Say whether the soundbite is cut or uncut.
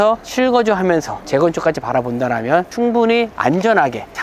uncut